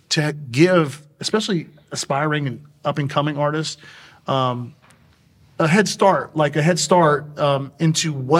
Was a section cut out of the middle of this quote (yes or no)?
no